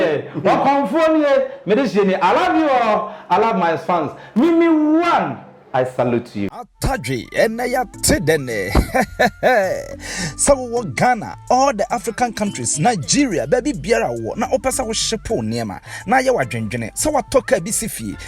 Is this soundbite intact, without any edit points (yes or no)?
no